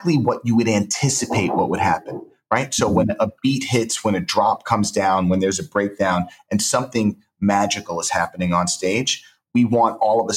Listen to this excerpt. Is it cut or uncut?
uncut